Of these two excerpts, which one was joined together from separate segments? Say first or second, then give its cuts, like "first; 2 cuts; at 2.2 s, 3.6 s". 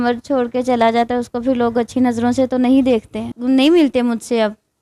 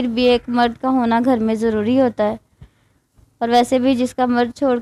first; 1 cut; at 3.3 s